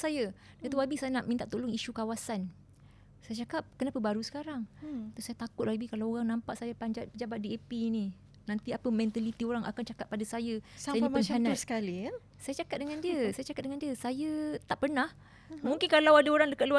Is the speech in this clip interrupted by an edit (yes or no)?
no